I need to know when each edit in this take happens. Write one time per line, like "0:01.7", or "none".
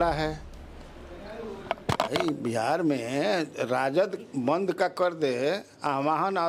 none